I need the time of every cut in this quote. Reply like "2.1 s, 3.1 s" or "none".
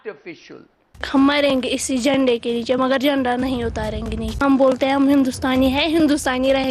1.1 s, 4.4 s